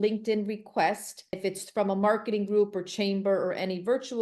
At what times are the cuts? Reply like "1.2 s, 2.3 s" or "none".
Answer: 1.4 s